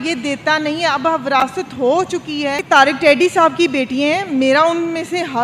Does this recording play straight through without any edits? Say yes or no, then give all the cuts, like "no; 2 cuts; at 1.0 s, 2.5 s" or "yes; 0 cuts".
no; 1 cut; at 2.6 s